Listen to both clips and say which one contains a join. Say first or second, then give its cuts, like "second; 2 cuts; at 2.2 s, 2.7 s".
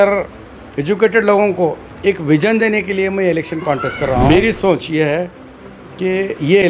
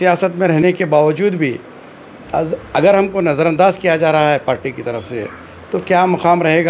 first; 1 cut; at 4.2 s